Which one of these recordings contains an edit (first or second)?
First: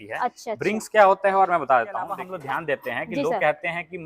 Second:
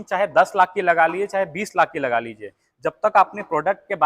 first